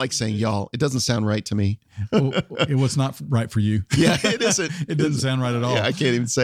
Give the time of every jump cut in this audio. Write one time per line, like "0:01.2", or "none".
none